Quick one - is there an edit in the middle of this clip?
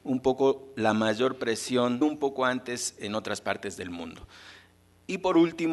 no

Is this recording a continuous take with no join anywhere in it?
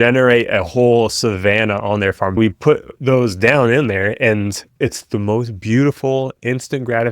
no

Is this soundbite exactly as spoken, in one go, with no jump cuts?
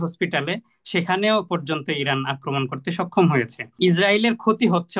no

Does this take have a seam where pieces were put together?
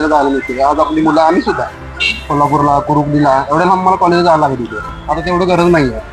no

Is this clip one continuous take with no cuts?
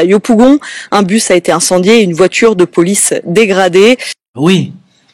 yes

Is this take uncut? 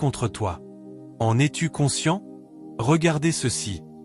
no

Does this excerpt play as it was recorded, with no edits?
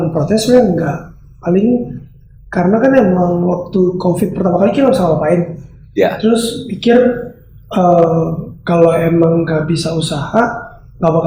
yes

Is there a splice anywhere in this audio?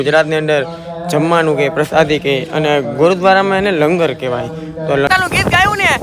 yes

